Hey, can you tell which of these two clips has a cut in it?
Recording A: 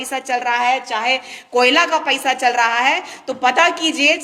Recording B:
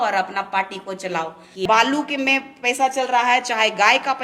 B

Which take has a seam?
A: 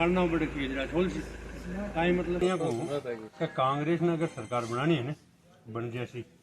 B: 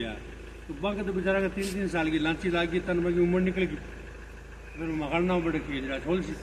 A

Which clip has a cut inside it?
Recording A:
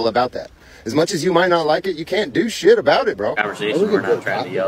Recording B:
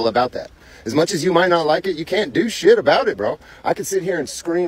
A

